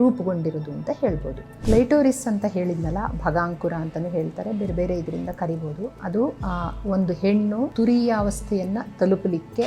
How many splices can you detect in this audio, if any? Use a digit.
3